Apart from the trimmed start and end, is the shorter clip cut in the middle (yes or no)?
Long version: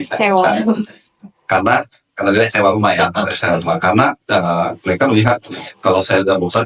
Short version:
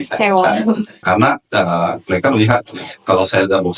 yes